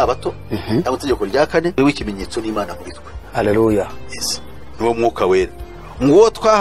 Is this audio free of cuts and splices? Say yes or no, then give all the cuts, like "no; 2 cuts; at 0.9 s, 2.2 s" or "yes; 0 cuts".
yes; 0 cuts